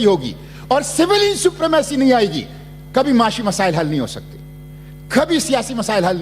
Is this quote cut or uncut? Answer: uncut